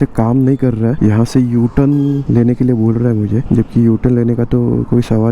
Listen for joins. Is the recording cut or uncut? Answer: uncut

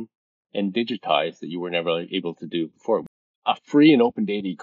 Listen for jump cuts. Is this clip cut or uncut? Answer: cut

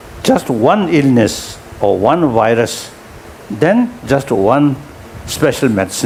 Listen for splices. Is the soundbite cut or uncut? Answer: uncut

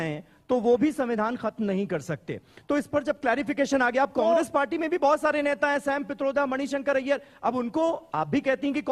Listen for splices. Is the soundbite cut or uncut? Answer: uncut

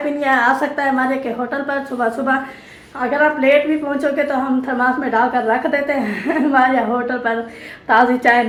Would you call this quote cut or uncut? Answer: uncut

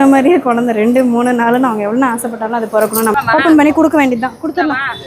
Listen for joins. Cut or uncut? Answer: cut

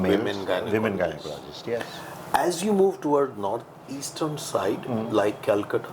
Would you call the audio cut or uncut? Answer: uncut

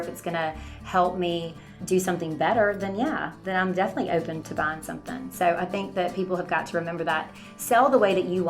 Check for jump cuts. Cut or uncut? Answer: cut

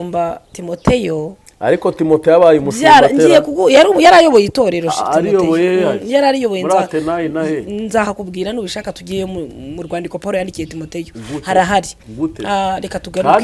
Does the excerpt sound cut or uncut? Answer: uncut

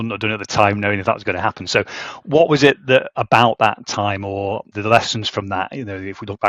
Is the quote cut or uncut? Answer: cut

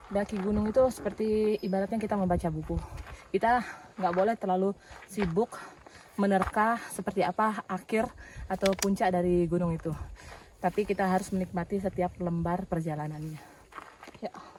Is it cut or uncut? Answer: uncut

